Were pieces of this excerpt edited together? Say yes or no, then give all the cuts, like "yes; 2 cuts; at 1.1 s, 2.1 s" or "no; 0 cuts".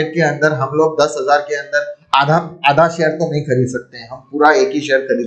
no; 0 cuts